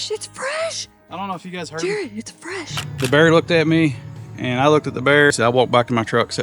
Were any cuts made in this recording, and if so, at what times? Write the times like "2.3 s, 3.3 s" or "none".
2.8 s, 5.3 s